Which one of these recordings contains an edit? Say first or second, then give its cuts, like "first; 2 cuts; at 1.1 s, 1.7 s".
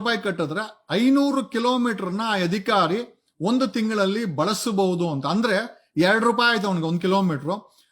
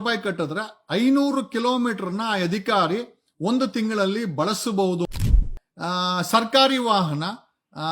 second; 1 cut; at 5.2 s